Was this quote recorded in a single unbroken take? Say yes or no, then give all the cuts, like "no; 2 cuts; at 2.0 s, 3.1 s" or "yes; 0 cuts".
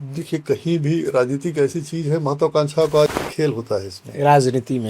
no; 1 cut; at 3.1 s